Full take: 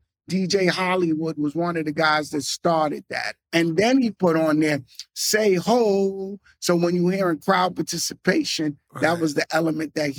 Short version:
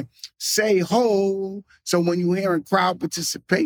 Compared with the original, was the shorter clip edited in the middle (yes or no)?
no